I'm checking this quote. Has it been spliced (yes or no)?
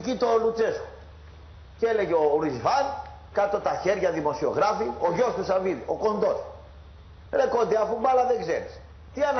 yes